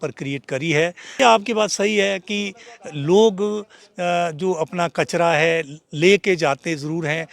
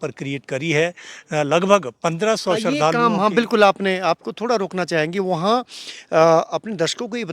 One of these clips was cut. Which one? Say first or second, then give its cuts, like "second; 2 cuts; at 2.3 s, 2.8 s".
first; 1 cut; at 1.2 s